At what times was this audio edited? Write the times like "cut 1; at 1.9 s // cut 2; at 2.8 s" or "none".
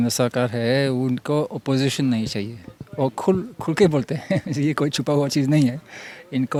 none